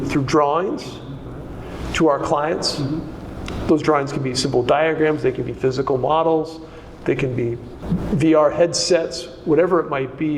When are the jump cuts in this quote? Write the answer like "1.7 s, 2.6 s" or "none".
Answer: 7.7 s